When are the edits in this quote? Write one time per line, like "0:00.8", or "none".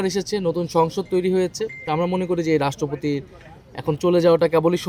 none